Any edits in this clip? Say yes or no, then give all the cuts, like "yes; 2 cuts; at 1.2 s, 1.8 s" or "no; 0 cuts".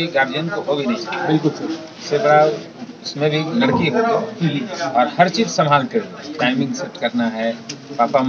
no; 0 cuts